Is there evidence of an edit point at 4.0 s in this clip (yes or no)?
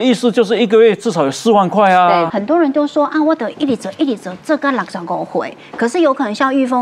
no